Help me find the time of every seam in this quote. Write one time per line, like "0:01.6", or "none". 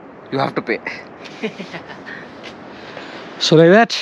0:02.9

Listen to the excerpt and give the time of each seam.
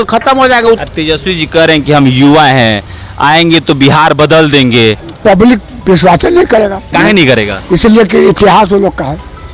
0:00.8
0:05.1
0:06.9

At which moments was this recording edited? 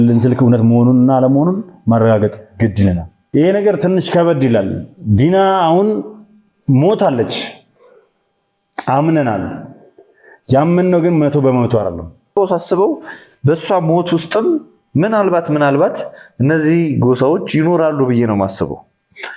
0:03.1
0:12.3

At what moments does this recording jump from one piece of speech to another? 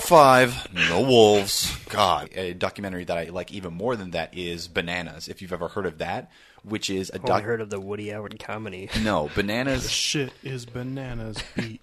0:02.3

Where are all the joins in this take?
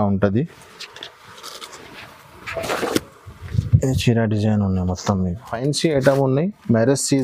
0:05.4

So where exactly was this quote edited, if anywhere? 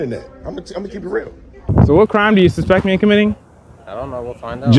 0:01.7

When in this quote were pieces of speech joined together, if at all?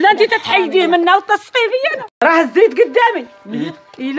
0:02.0

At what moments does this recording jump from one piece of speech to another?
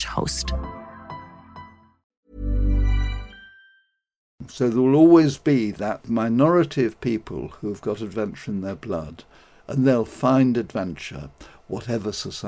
0:04.4
0:06.0

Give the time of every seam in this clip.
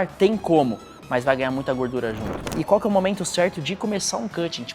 0:02.4

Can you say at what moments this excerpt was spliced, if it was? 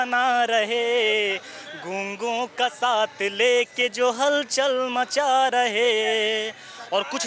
none

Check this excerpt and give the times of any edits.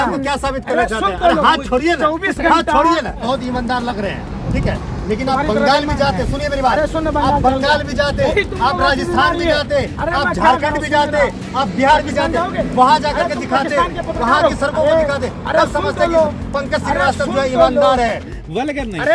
0:03.2
0:18.3

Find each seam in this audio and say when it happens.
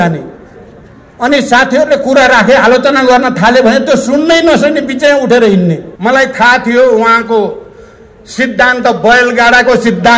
0:05.9

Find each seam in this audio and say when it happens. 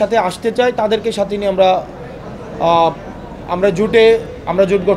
none

